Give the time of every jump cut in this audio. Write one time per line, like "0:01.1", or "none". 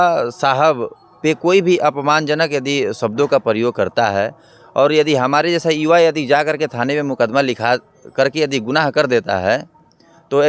none

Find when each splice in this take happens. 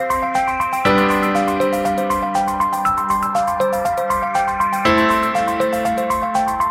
none

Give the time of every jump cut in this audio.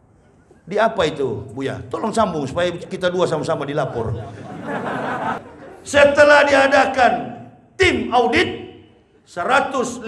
0:05.4

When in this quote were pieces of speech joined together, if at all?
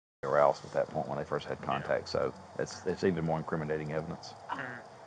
none

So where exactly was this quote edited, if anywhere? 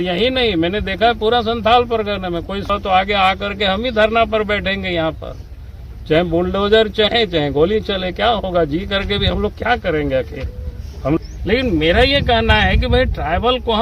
0:02.7
0:11.2

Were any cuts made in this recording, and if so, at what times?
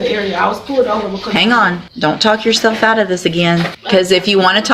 0:01.8
0:03.8

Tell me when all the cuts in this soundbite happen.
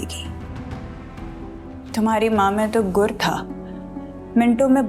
0:01.8

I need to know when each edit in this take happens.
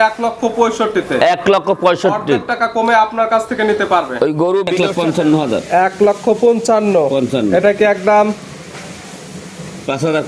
0:04.7

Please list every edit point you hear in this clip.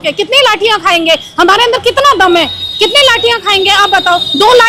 none

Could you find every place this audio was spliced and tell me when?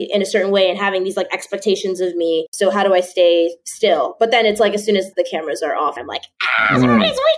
0:02.5
0:05.1
0:05.9

